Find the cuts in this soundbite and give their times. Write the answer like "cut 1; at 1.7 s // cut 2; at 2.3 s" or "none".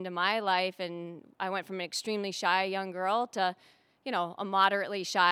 none